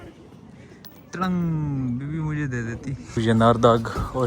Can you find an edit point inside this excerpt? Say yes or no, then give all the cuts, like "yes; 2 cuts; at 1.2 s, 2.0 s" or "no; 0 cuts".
yes; 1 cut; at 3.2 s